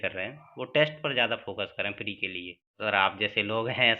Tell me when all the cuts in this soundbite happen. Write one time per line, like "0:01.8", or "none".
0:02.8

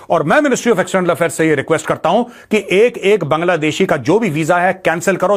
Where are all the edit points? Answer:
none

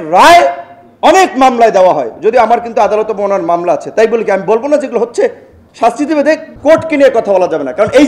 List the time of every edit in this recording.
0:06.5

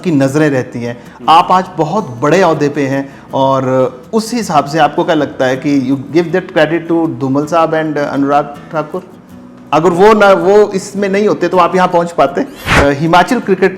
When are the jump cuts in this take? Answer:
0:12.6

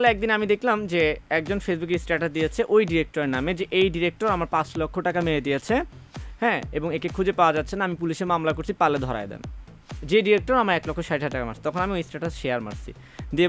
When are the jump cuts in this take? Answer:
none

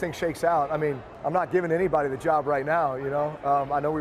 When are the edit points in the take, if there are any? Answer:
0:01.1

